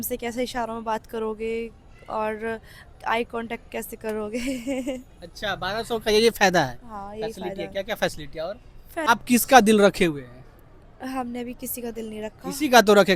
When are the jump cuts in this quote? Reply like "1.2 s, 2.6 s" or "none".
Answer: 9.1 s